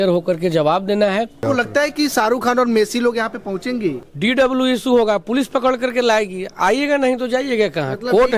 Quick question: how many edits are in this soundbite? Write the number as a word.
two